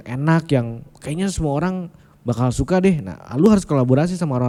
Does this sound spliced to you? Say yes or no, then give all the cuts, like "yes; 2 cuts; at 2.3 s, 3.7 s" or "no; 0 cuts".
no; 0 cuts